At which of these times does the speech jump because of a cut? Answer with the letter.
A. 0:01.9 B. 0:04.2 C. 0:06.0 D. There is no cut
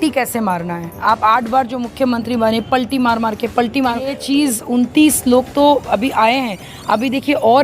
B